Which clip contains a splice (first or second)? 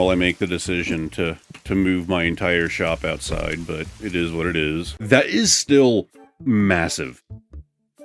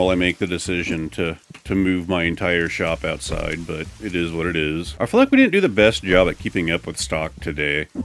first